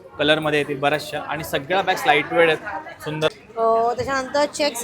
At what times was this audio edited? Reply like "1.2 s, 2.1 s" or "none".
3.3 s